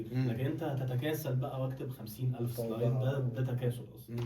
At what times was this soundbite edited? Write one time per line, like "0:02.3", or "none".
none